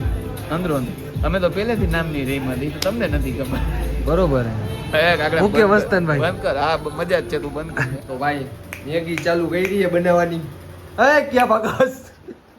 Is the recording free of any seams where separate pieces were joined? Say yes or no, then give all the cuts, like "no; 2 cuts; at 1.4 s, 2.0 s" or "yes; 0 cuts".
no; 1 cut; at 8.0 s